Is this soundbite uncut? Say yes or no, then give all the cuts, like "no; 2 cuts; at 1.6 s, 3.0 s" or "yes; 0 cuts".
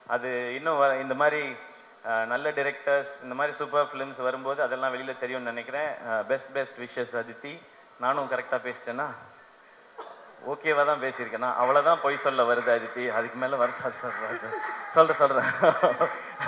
yes; 0 cuts